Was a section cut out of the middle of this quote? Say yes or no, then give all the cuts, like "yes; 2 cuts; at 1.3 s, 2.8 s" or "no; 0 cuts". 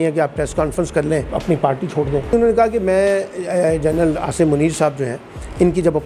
yes; 2 cuts; at 1.3 s, 2.3 s